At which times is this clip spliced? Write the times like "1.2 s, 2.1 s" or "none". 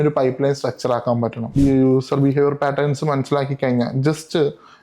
1.5 s